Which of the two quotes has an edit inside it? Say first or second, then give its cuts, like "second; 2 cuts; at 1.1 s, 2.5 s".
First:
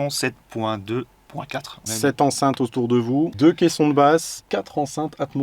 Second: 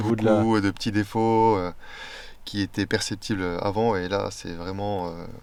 first; 3 cuts; at 1.8 s, 3.3 s, 4.4 s